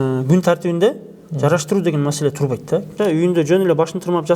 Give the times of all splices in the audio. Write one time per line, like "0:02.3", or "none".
0:02.9